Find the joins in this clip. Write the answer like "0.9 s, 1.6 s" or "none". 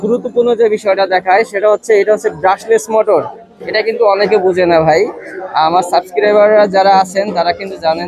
none